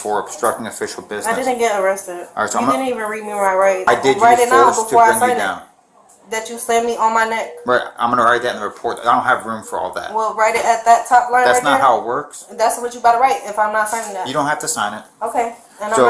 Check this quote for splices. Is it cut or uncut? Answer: cut